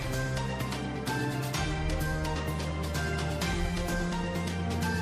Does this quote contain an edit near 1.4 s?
yes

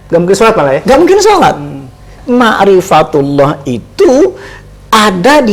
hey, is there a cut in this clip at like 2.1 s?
yes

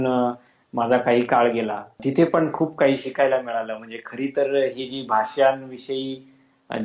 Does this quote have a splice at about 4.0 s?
no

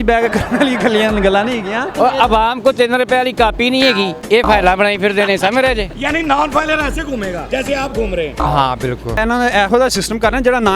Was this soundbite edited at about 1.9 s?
yes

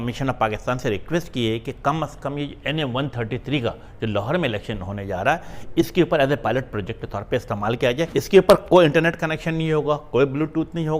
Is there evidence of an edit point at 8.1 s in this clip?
yes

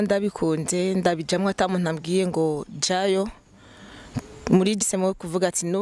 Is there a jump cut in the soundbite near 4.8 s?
yes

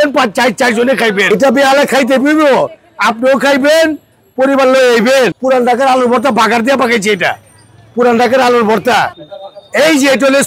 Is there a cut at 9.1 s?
yes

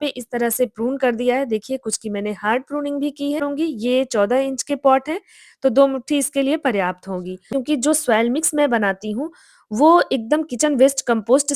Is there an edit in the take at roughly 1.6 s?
no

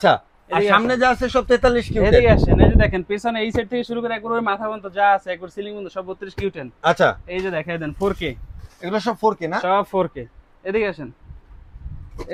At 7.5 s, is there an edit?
no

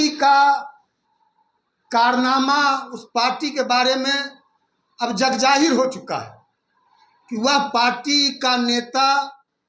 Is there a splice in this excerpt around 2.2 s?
no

